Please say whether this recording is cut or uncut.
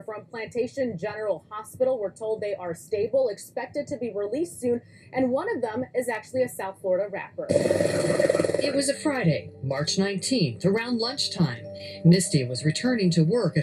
cut